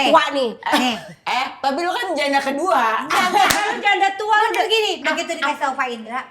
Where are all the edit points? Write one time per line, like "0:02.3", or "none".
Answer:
0:05.0

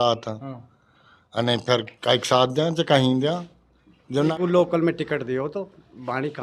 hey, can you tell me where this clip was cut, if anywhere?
0:04.3

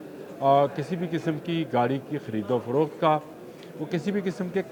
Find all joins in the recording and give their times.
none

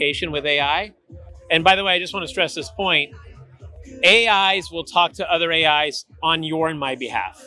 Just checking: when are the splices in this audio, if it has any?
none

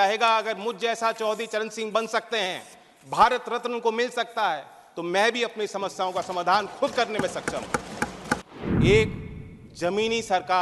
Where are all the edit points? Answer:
0:08.5

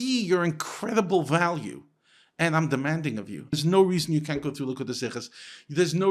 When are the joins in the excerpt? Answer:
0:03.5

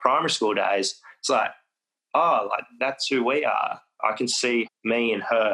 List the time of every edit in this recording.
0:03.9
0:04.7

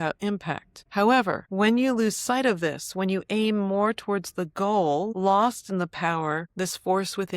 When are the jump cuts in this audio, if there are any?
0:06.5

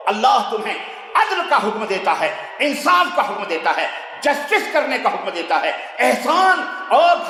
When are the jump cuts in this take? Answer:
none

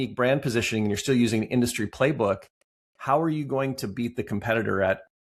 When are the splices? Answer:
none

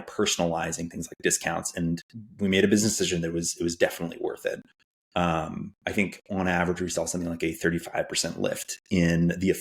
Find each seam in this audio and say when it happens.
none

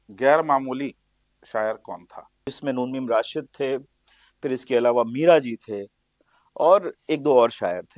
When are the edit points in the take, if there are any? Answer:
0:02.6

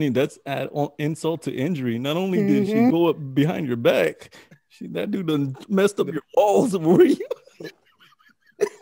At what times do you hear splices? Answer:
none

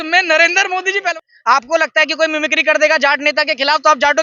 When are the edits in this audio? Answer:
0:01.1

